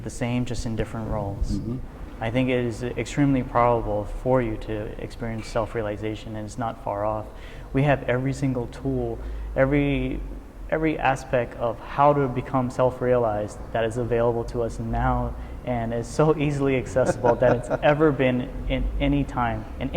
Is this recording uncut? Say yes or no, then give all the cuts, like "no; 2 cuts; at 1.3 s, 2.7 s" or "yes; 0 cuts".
no; 1 cut; at 1.9 s